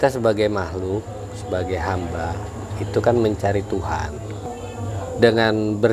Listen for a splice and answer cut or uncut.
cut